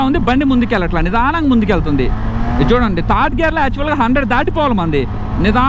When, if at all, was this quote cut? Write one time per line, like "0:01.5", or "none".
none